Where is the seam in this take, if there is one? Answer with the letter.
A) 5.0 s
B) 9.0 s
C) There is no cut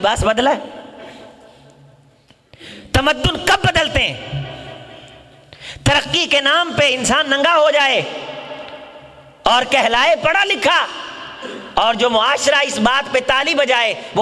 C